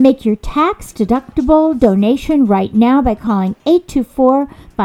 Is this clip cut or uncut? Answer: uncut